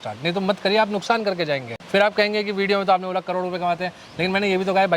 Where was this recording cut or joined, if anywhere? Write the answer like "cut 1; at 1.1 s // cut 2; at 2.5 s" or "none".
cut 1; at 1.7 s